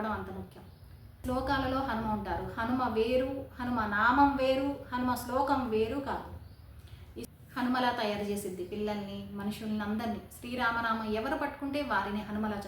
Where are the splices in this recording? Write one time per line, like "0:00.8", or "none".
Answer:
0:01.2
0:07.3